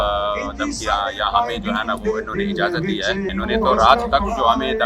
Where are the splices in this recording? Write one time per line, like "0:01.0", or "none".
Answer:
0:03.3